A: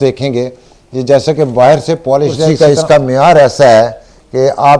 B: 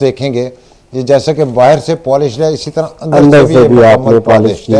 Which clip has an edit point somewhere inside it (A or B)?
A